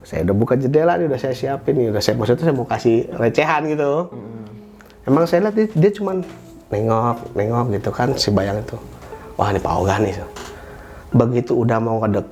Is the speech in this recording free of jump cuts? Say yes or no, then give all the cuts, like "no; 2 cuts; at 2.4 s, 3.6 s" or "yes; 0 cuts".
yes; 0 cuts